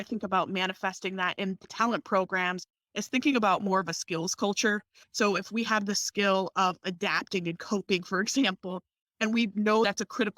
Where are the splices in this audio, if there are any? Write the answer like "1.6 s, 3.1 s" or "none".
1.7 s, 5.0 s